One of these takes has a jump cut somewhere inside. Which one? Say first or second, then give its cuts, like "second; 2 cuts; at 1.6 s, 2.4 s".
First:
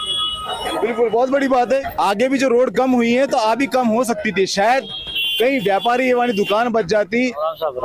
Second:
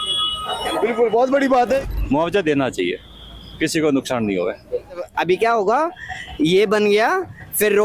second; 2 cuts; at 1.9 s, 5.0 s